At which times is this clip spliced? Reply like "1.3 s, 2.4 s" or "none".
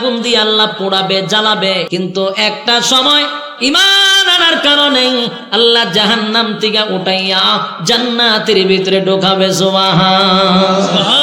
1.9 s